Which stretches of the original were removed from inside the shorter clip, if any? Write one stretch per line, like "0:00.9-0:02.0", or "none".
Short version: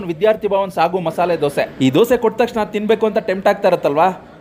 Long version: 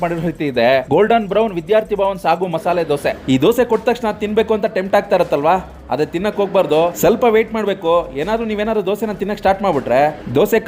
none